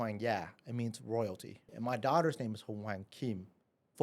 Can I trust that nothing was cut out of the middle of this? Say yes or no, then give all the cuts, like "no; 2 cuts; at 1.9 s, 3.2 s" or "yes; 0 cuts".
no; 1 cut; at 1.7 s